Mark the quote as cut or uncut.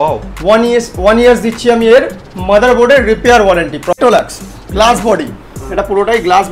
cut